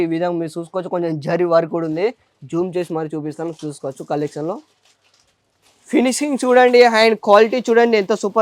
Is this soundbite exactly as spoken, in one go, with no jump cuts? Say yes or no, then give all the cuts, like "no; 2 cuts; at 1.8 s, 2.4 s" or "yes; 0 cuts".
yes; 0 cuts